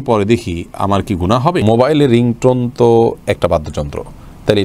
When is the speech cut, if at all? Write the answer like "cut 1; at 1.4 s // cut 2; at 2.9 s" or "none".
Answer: cut 1; at 1.6 s